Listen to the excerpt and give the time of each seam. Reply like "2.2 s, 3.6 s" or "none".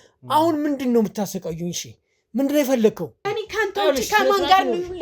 3.1 s